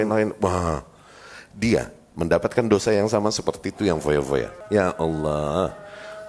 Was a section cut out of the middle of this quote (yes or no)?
yes